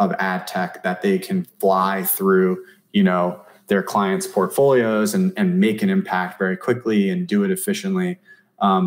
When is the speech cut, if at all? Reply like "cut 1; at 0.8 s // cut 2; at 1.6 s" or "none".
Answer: none